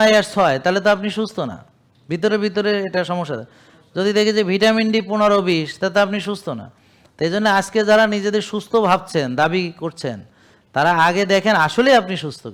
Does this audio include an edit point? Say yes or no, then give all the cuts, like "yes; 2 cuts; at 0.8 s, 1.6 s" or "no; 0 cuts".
no; 0 cuts